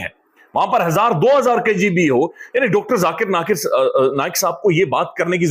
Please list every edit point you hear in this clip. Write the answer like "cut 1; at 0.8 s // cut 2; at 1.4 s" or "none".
none

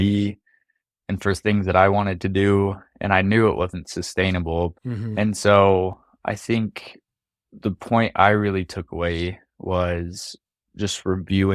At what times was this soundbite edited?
cut 1; at 4.8 s

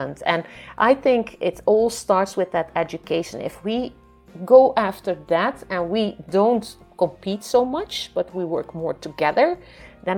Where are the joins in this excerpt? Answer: none

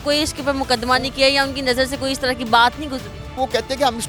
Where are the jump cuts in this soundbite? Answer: none

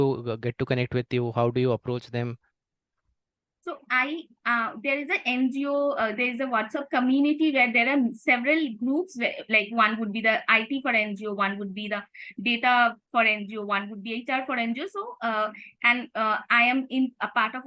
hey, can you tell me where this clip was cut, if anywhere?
none

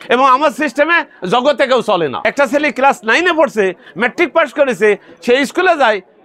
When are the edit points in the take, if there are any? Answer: cut 1; at 2.2 s

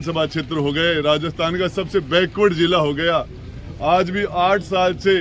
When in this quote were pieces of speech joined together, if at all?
none

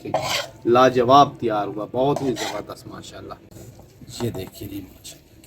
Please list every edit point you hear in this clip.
cut 1; at 3.5 s

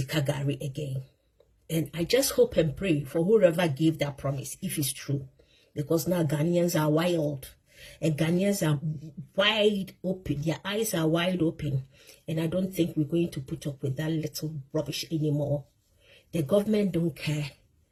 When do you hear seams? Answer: none

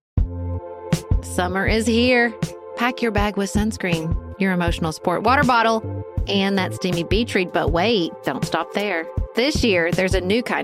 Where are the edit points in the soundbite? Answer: cut 1; at 1.0 s

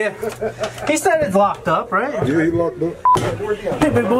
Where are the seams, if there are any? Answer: cut 1; at 3.2 s

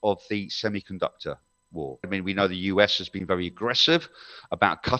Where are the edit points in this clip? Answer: cut 1; at 2.1 s

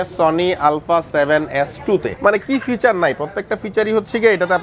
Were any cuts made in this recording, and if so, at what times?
cut 1; at 2.1 s

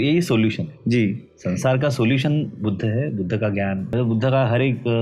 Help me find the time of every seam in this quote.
cut 1; at 3.9 s

